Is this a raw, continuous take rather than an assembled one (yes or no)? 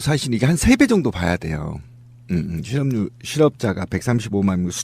no